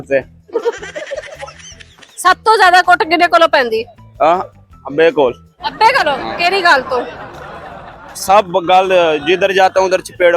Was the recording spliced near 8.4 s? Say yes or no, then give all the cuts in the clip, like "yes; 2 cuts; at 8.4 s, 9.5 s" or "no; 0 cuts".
no; 0 cuts